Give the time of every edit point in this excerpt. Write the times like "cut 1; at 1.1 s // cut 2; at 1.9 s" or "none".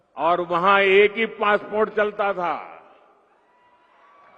none